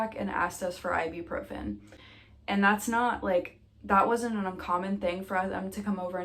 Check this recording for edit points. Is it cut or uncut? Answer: uncut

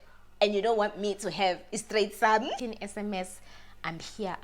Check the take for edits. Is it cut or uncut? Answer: cut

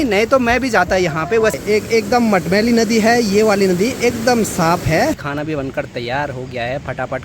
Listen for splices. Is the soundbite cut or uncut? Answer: cut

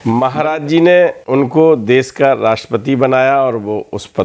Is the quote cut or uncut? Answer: cut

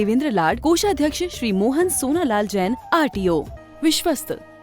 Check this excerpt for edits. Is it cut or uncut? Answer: cut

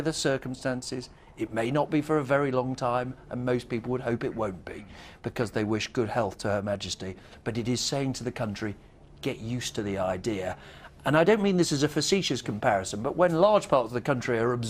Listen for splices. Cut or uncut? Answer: cut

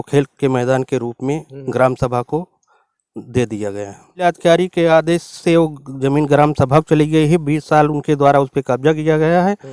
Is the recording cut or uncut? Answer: cut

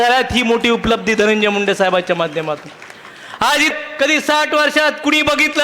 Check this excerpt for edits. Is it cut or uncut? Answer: cut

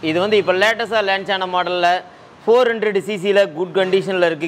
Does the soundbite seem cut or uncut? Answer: uncut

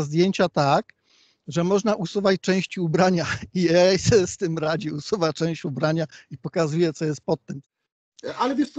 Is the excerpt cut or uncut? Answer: cut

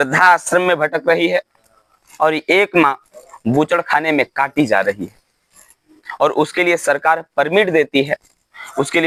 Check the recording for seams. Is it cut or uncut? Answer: uncut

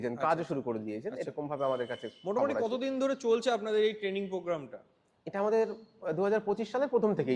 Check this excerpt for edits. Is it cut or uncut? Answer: uncut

